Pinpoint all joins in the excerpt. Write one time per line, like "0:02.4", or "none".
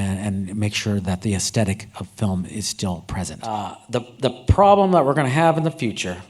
0:03.4

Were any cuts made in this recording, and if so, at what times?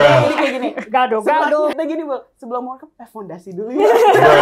0:01.8

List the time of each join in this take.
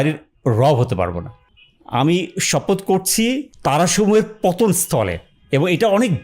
0:01.5
0:03.5

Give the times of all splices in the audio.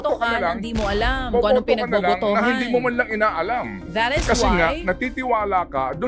none

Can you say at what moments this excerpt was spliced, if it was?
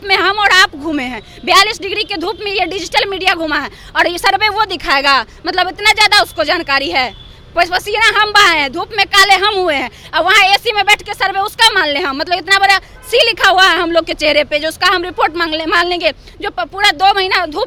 none

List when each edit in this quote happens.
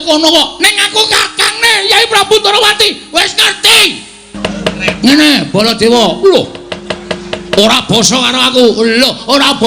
0:04.3

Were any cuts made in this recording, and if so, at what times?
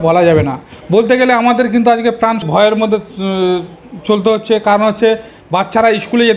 0:02.4

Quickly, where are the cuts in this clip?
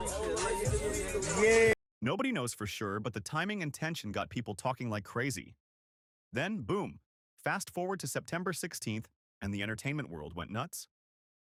none

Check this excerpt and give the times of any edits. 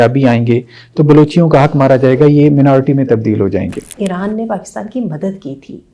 0:04.0

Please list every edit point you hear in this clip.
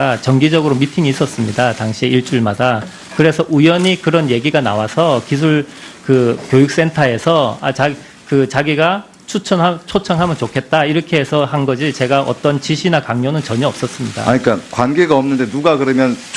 0:10.2

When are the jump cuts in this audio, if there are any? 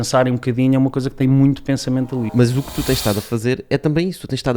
0:02.3

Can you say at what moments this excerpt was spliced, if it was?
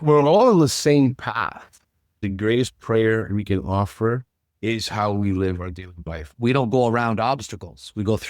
0:02.2
0:06.3

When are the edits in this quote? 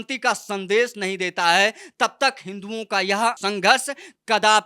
0:03.4

